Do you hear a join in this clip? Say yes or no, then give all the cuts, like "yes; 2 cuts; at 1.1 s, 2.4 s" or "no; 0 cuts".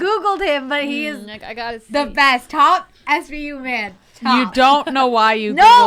no; 0 cuts